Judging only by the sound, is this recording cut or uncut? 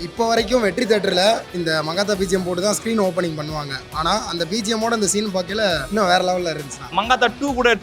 cut